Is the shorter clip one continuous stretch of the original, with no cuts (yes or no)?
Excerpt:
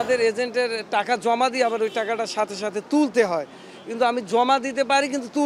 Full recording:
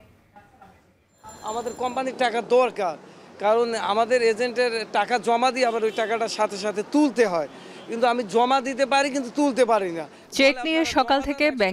yes